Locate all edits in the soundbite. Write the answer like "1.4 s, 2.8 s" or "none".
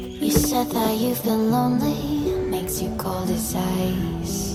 none